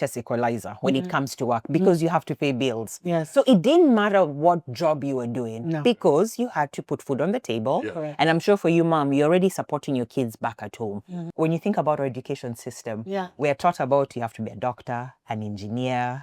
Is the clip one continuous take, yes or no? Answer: no